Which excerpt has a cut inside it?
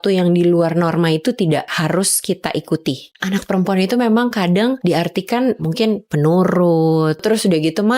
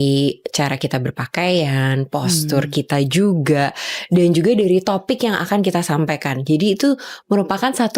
first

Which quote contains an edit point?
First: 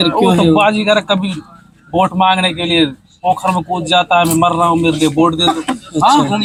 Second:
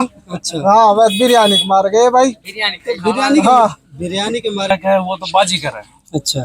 second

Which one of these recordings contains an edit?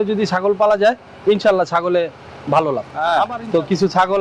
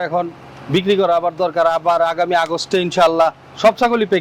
first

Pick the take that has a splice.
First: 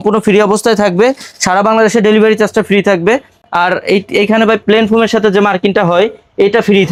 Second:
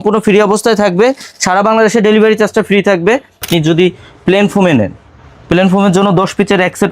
second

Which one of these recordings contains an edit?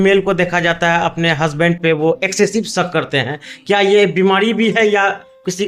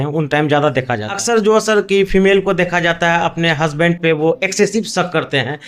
second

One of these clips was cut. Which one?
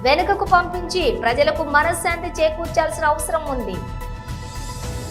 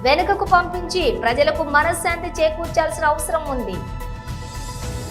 first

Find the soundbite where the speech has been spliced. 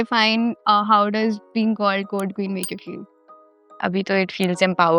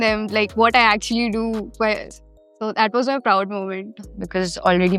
second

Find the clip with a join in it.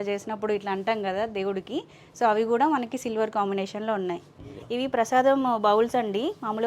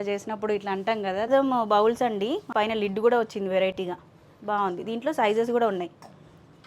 second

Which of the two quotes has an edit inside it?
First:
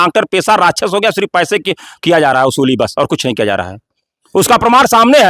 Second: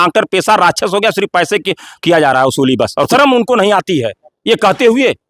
second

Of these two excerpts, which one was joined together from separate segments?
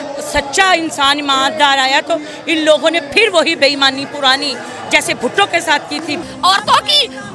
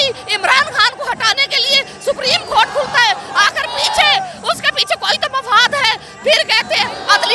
first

